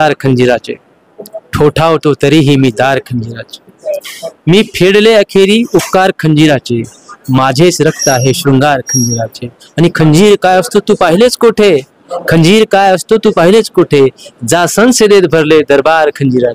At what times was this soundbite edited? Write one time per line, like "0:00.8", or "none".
none